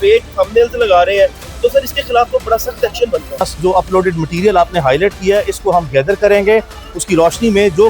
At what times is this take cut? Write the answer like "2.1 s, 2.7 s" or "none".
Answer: 3.5 s